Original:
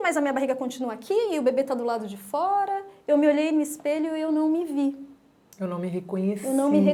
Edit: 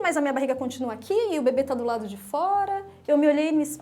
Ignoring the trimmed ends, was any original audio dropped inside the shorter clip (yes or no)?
no